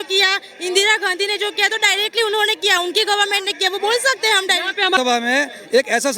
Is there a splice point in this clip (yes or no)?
yes